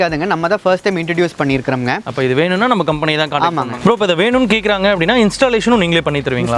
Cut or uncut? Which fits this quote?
uncut